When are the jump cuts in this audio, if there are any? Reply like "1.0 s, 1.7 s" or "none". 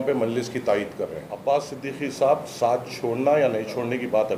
1.3 s